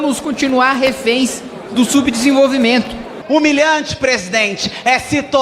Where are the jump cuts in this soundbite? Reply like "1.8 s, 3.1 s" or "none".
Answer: 3.1 s